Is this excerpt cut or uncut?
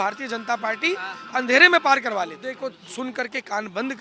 cut